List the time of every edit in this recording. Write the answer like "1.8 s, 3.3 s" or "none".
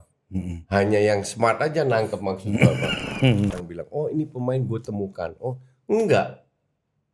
3.6 s